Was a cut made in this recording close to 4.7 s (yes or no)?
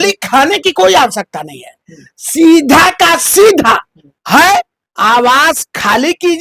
no